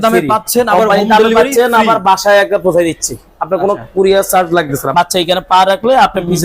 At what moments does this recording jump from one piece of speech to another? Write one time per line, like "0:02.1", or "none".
0:04.9